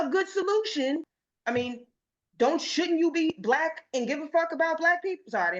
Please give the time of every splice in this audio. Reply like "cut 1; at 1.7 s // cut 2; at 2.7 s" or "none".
cut 1; at 1.1 s